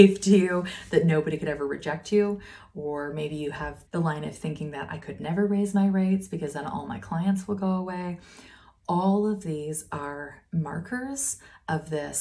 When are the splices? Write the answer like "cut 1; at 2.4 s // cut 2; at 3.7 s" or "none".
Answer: cut 1; at 3.8 s